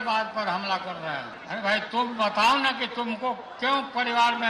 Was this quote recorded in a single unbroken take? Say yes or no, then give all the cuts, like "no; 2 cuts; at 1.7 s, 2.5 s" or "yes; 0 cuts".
no; 1 cut; at 1.3 s